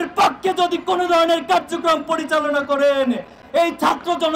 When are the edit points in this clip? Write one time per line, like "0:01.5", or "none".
none